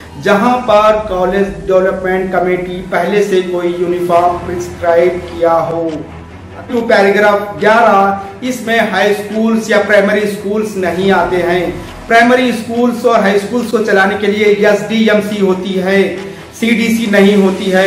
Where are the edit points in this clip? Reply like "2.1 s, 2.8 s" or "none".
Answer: 6.6 s